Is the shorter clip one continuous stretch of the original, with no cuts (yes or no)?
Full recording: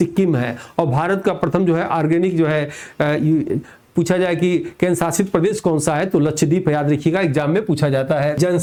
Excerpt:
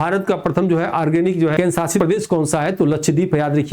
no